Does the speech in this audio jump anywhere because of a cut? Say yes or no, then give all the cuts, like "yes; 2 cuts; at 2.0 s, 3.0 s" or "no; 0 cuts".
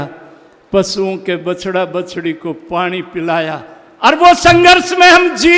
no; 0 cuts